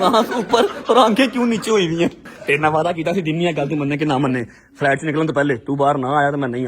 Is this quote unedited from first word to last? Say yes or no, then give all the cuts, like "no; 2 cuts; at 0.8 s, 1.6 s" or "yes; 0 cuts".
no; 1 cut; at 2.3 s